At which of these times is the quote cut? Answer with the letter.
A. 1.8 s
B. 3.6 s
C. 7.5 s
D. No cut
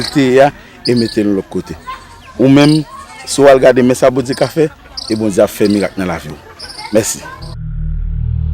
C